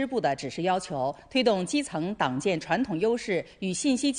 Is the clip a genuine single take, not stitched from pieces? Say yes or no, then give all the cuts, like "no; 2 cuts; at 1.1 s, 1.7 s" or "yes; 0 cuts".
no; 1 cut; at 2.4 s